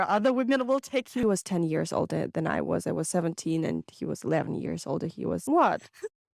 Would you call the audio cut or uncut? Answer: cut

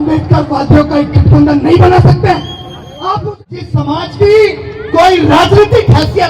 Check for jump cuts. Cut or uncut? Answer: cut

